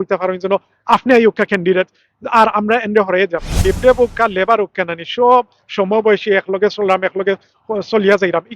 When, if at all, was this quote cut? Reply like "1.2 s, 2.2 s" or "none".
3.5 s